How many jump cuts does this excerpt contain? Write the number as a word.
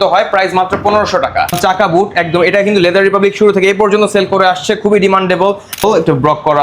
two